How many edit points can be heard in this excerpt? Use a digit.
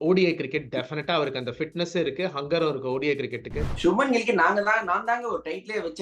1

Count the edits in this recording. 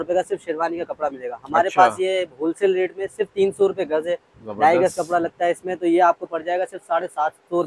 0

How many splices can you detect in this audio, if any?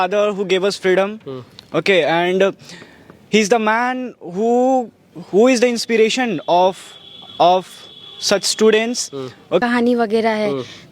1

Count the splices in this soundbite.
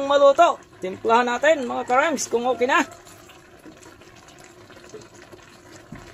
0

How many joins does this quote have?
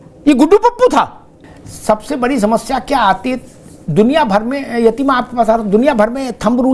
0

